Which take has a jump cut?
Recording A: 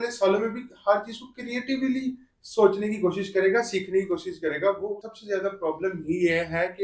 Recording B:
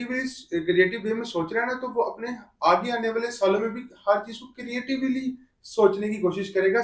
A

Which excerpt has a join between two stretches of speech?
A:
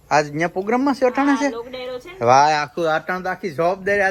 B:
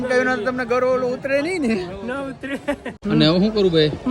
B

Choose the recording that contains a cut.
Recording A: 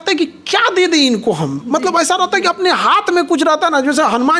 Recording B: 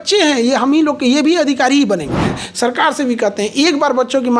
B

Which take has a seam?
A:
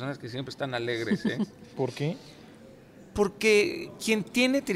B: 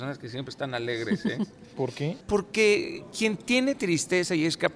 B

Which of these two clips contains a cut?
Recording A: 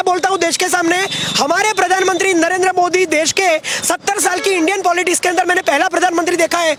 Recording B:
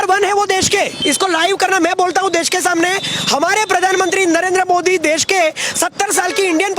B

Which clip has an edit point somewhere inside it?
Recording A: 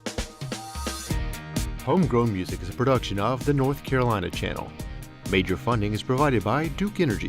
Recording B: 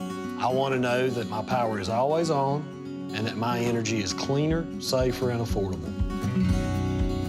A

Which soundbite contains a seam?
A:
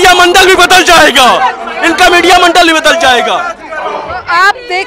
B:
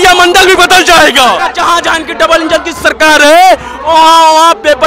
B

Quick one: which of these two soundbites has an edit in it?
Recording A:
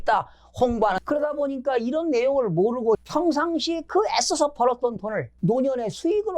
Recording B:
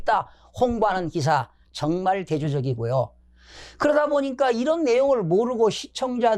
A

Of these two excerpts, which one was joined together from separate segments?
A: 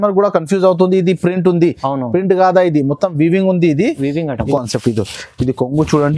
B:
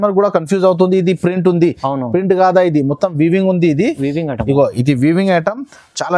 A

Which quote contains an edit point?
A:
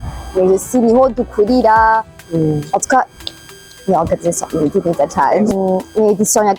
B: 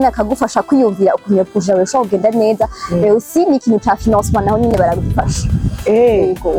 A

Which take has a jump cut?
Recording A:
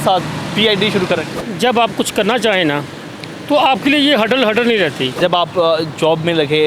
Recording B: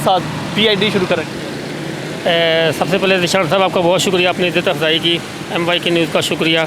A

